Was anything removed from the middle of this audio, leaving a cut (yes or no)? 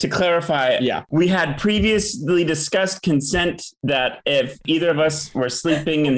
yes